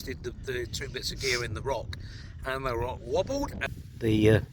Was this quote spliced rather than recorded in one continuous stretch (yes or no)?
yes